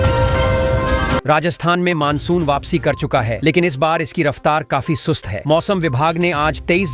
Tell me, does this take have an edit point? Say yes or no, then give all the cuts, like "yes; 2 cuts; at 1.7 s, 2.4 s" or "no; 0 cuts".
yes; 1 cut; at 1.2 s